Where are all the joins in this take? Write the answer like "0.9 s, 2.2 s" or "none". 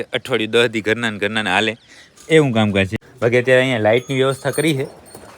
3.0 s